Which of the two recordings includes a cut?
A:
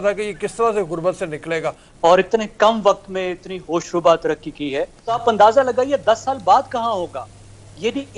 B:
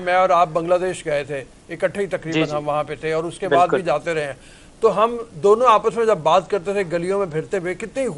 A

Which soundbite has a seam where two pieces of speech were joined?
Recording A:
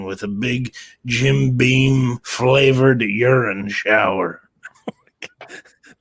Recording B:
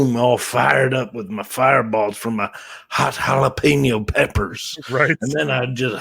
A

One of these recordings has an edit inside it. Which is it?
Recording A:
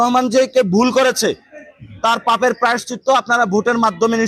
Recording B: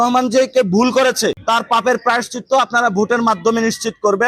B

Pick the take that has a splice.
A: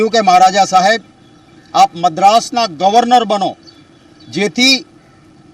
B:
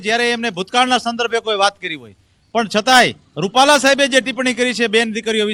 A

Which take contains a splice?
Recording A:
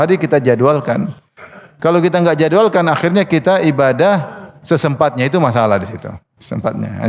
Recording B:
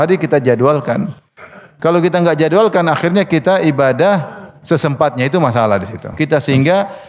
B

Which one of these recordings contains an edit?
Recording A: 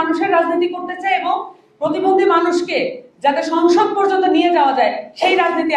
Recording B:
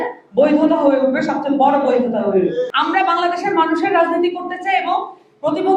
B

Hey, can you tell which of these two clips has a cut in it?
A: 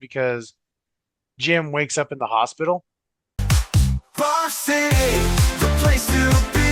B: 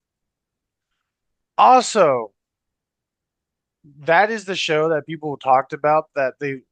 A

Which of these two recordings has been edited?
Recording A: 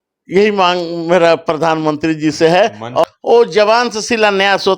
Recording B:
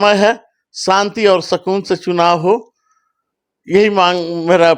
A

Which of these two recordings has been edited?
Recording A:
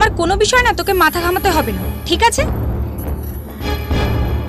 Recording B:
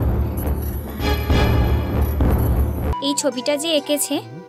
B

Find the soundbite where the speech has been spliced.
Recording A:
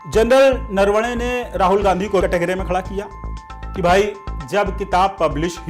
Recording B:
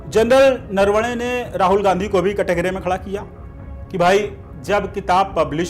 A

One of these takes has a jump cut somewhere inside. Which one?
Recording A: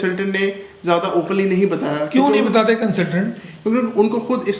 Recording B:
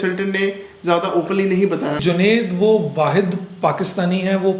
B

